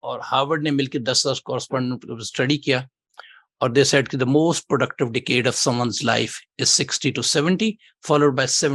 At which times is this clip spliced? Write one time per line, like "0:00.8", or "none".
none